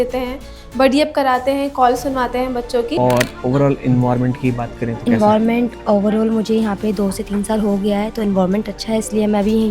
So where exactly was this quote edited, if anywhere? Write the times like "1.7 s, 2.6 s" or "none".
3.0 s